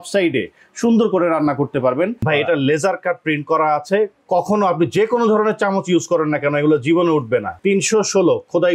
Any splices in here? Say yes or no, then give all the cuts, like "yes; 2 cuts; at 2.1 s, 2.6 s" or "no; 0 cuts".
yes; 2 cuts; at 2.2 s, 7.5 s